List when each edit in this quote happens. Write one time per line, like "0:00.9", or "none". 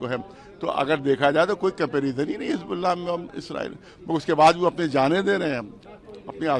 none